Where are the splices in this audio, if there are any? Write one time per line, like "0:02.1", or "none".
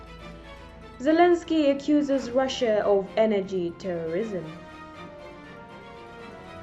0:01.0
0:04.5